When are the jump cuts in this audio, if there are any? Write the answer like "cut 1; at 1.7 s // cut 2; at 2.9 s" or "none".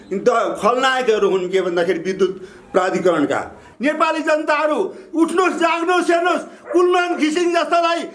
cut 1; at 3.6 s